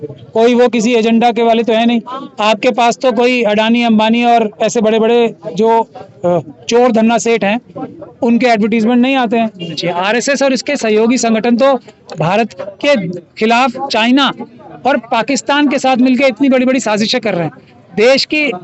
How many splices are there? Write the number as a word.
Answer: one